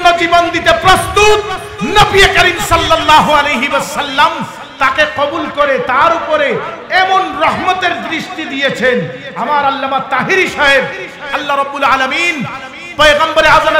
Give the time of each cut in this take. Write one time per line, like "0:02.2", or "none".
none

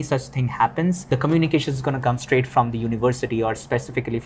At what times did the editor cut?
0:01.0

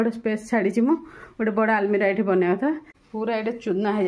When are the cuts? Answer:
0:02.9

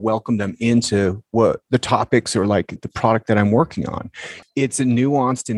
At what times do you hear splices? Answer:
0:01.6
0:02.8
0:04.4

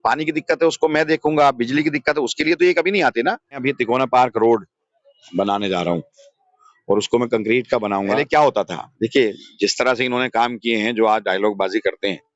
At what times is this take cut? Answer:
0:03.5
0:08.2

